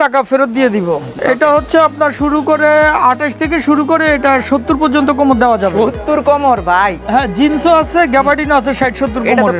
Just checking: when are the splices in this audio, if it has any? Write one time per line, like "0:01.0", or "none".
0:01.1